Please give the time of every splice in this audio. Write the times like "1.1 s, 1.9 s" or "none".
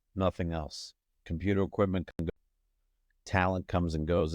2.3 s